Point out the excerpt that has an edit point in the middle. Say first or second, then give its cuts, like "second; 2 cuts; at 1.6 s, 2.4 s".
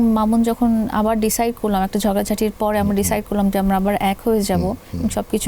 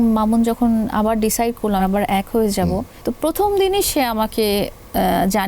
second; 2 cuts; at 1.9 s, 2.9 s